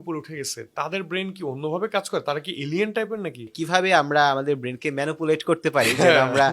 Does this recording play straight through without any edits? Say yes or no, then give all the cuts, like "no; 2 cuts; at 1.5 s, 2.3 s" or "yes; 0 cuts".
no; 1 cut; at 3.5 s